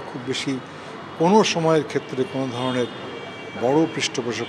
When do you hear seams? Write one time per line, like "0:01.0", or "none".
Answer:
none